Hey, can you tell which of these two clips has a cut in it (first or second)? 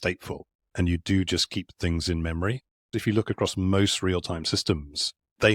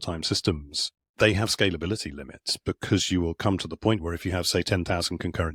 first